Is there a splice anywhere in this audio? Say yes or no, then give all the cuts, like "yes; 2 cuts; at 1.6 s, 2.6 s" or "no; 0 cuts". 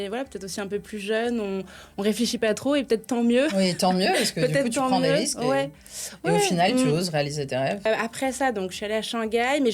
yes; 1 cut; at 7.8 s